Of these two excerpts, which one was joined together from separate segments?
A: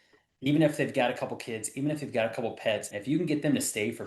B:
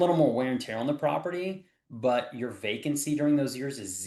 A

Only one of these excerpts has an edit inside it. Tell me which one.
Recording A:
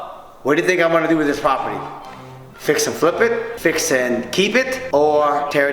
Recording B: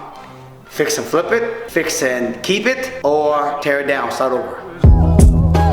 B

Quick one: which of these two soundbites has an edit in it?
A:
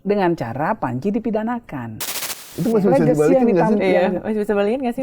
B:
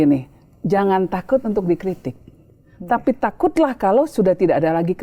A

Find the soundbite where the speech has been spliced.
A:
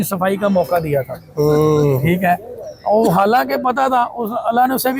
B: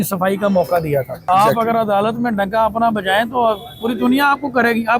B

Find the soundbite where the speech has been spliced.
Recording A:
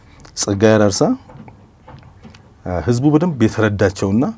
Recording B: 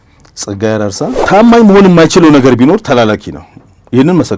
B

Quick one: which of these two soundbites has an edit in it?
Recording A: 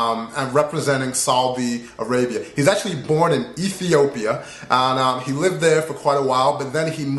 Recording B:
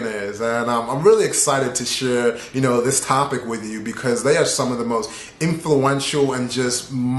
B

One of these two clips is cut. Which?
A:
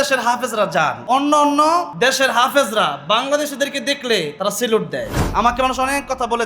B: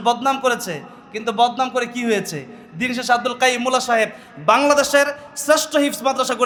A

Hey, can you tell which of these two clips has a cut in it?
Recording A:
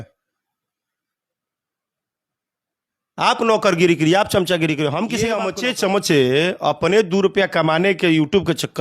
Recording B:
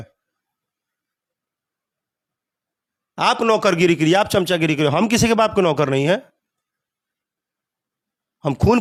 A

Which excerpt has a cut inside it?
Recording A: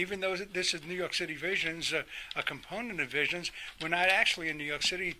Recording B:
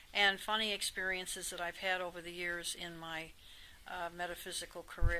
B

